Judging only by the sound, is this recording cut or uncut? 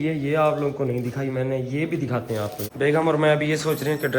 cut